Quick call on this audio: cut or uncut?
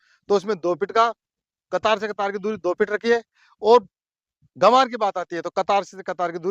uncut